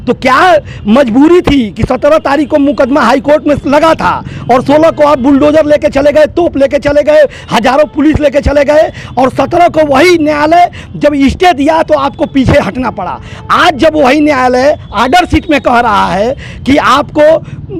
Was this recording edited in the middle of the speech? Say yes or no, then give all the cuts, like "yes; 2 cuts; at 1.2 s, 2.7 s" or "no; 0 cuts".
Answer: no; 0 cuts